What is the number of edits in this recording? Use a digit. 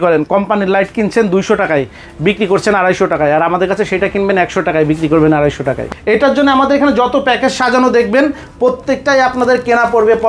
1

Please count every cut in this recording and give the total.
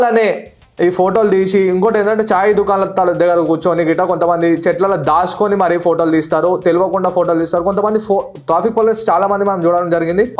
0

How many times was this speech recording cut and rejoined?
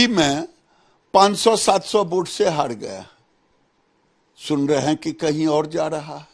0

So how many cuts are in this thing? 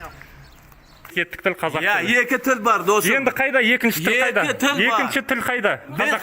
1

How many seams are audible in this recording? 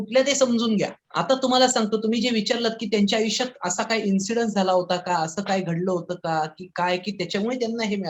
1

